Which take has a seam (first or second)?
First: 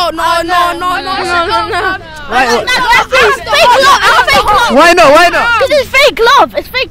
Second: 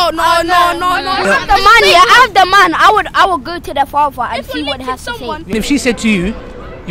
second